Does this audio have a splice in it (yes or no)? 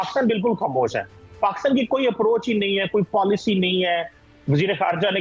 no